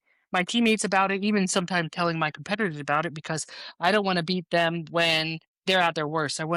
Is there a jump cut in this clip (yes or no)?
no